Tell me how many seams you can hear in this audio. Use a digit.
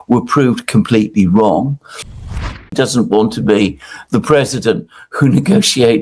1